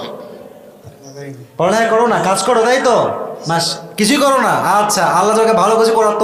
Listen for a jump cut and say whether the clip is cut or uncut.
uncut